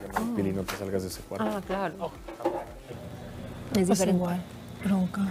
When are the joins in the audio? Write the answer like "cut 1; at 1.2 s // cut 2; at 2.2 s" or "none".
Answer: cut 1; at 2.9 s